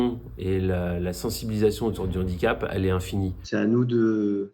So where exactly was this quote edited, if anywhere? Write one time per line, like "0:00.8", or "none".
0:03.4